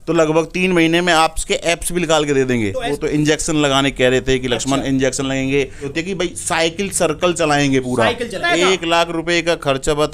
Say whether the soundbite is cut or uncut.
cut